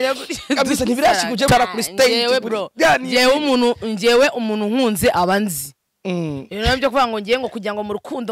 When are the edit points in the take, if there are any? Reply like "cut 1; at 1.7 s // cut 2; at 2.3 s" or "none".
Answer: cut 1; at 1.5 s

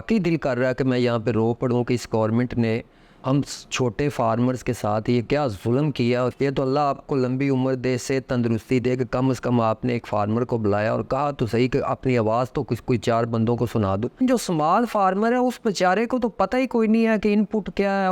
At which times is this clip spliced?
cut 1; at 6.3 s // cut 2; at 14.2 s

